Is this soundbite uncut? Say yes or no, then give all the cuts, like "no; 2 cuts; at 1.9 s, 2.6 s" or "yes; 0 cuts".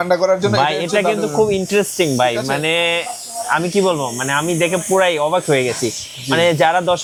yes; 0 cuts